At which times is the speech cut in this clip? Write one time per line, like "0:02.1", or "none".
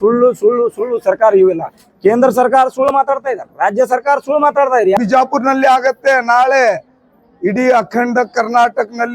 0:05.0